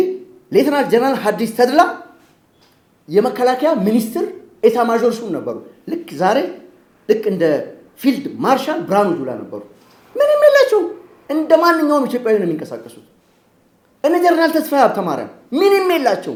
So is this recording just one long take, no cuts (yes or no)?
yes